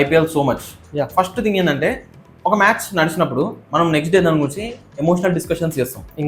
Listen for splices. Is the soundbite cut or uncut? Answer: uncut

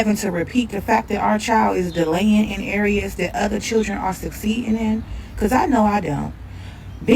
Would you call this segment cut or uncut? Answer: cut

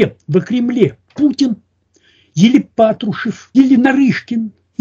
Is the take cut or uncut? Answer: cut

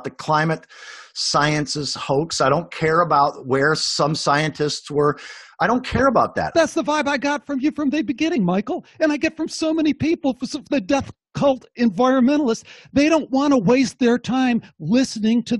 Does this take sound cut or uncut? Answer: cut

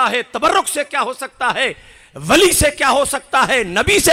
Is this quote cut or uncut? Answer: uncut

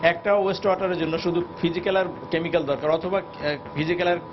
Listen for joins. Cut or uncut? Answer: uncut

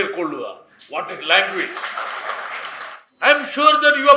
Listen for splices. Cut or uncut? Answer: cut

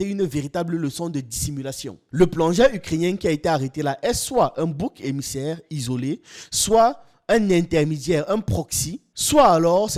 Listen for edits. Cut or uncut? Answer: uncut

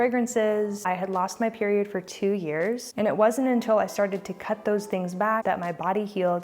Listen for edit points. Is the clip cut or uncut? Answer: cut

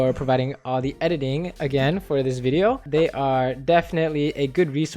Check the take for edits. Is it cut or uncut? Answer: cut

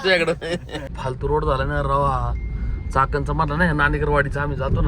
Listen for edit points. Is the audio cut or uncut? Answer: cut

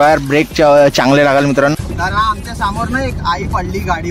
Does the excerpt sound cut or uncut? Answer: cut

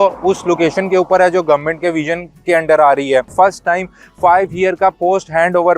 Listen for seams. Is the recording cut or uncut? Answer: cut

